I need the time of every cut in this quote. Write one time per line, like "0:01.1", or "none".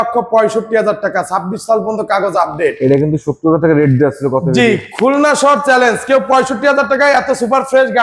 none